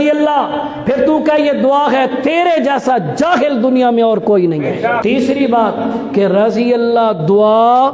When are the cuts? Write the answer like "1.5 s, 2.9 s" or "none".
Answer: 5.0 s